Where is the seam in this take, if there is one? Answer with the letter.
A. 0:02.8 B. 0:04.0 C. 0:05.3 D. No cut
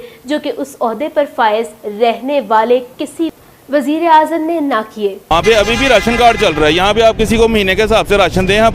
C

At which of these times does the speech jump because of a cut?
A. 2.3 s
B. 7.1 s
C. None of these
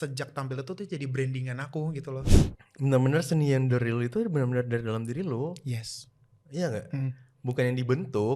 A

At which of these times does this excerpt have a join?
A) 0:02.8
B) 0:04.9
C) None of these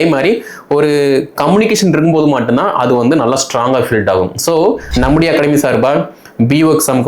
B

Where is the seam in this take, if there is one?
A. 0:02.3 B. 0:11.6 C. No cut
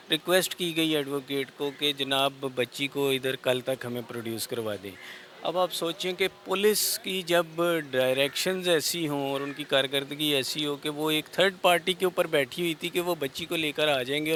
C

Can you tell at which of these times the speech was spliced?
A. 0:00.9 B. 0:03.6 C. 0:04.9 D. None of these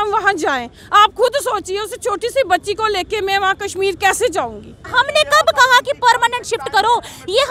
C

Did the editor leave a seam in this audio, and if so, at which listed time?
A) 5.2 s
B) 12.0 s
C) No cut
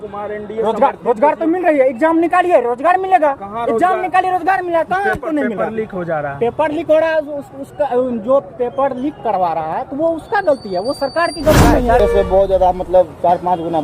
B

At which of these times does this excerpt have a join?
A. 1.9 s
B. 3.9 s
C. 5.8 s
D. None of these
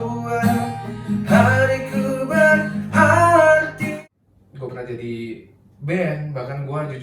B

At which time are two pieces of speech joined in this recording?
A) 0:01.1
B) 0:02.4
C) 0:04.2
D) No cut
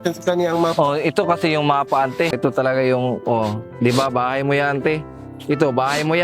B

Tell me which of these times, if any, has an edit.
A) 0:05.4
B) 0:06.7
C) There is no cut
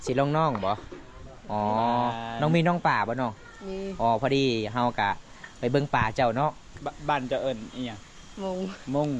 B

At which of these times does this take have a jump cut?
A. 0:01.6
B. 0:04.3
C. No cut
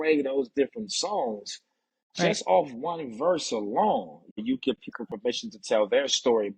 B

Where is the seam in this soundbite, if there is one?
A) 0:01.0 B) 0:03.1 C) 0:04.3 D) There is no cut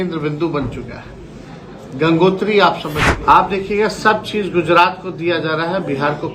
B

